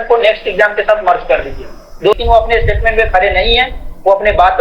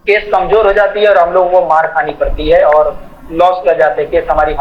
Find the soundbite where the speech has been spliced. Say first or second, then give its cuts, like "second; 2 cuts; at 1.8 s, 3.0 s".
first; 1 cut; at 2.1 s